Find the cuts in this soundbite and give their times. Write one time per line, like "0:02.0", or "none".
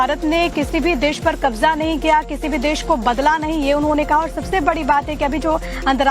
0:03.4